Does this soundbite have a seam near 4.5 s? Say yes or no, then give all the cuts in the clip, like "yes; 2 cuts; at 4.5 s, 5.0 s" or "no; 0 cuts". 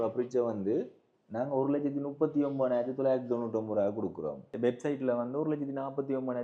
yes; 1 cut; at 4.5 s